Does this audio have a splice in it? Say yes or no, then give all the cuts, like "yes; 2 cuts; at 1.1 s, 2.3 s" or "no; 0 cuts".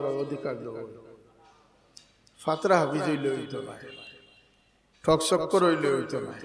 no; 0 cuts